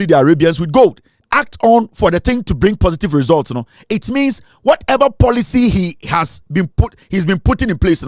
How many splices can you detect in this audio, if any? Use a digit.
1